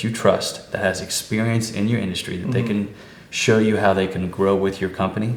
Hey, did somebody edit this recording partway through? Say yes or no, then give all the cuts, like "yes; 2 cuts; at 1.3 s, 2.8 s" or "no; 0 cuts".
no; 0 cuts